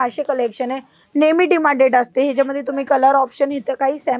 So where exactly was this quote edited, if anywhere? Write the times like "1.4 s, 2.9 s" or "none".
none